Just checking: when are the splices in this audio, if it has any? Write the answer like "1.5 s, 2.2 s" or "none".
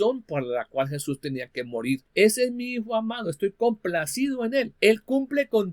2.1 s, 4.7 s